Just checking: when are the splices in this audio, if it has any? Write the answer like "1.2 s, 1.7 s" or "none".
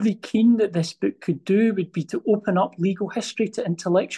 none

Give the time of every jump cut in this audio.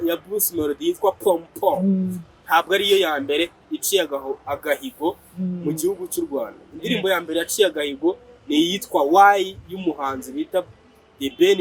none

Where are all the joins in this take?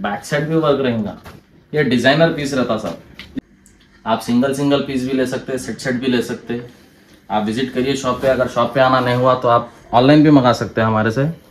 3.4 s

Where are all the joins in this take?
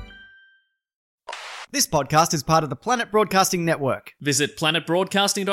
1.2 s

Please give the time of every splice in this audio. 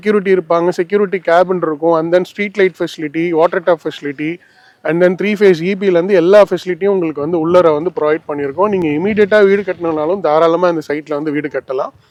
none

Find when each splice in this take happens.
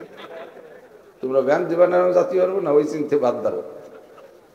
none

